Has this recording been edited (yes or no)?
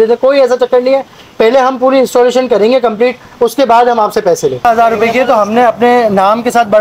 yes